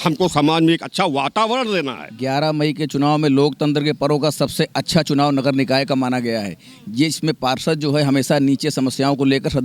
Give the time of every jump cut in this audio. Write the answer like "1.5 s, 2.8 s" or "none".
2.0 s

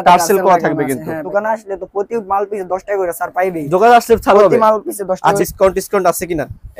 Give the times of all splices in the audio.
1.2 s, 5.4 s

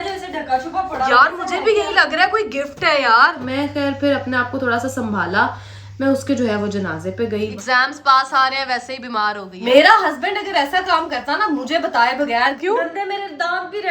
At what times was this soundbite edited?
3.4 s, 7.6 s, 9.6 s, 12.6 s

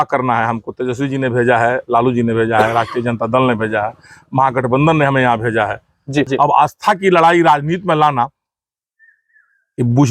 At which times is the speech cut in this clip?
6.3 s

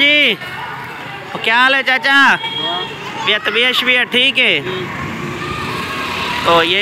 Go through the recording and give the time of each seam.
none

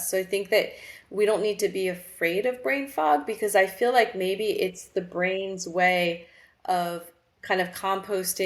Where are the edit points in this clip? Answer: none

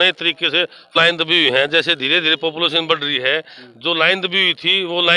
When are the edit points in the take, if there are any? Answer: 0.9 s

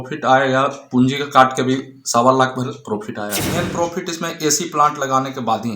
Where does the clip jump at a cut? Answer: 3.5 s

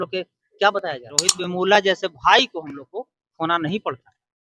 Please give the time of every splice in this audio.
1.4 s

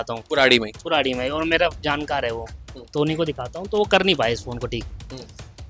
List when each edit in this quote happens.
none

